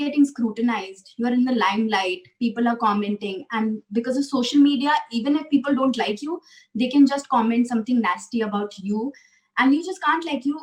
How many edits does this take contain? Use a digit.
0